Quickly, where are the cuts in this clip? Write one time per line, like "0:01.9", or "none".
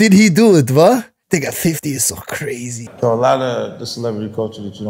0:01.2
0:02.9